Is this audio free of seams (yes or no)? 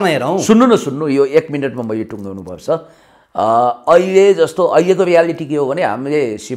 yes